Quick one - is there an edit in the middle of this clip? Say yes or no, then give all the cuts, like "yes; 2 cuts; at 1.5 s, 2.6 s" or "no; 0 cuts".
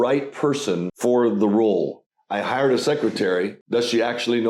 yes; 3 cuts; at 0.9 s, 2.0 s, 3.6 s